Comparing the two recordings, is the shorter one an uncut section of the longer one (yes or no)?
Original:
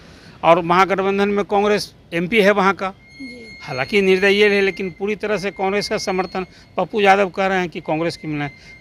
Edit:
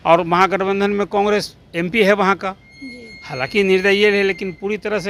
yes